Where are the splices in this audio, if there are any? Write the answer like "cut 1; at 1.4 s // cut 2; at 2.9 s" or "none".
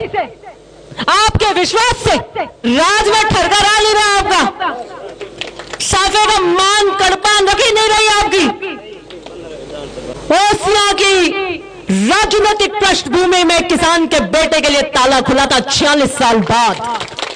cut 1; at 2.6 s // cut 2; at 10.1 s